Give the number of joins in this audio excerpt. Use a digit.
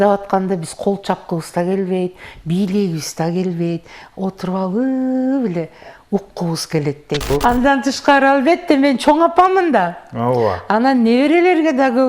1